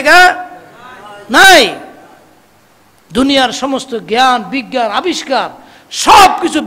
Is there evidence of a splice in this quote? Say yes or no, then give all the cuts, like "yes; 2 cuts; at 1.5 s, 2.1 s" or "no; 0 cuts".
no; 0 cuts